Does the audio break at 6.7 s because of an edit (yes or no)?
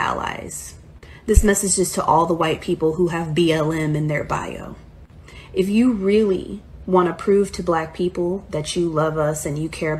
no